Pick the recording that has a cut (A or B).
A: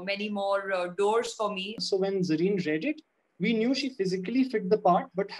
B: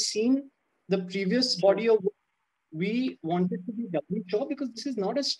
A